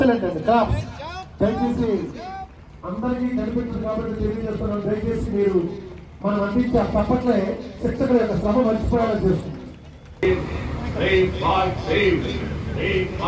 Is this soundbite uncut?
yes; 0 cuts

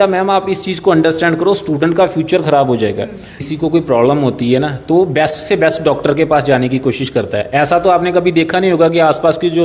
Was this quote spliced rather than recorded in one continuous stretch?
yes; 1 cut; at 3.3 s

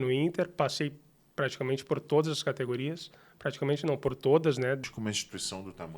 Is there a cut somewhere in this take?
yes; 1 cut; at 4.8 s

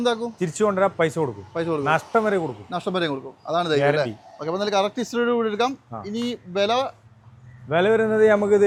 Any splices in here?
no; 0 cuts

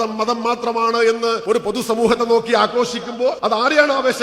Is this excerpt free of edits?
no; 2 cuts; at 1.4 s, 3.4 s

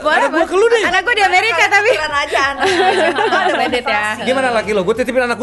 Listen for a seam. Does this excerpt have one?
no; 0 cuts

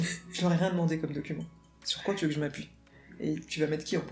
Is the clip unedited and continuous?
yes; 0 cuts

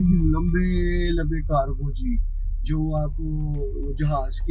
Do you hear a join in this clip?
no; 0 cuts

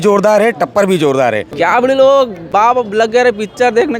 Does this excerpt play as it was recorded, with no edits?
no; 2 cuts; at 1.5 s, 2.6 s

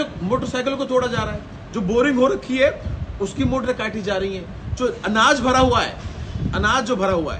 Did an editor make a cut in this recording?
no; 0 cuts

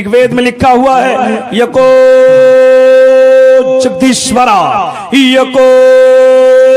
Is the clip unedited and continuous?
yes; 0 cuts

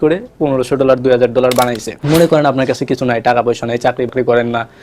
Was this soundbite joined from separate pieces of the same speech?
yes; 1 cut; at 1.9 s

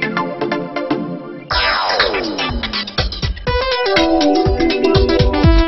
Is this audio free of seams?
yes; 0 cuts

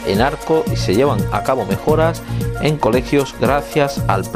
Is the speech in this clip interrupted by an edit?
no; 0 cuts

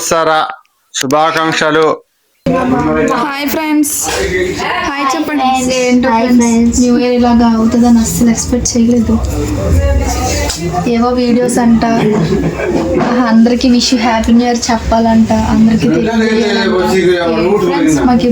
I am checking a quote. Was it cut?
yes; 1 cut; at 2.4 s

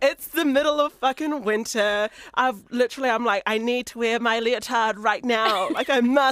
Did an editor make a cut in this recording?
yes; 1 cut; at 2.2 s

